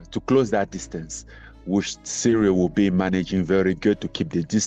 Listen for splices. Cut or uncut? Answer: uncut